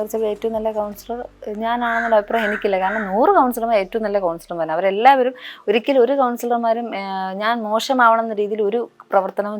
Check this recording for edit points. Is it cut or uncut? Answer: uncut